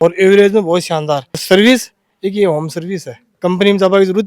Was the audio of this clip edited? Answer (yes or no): yes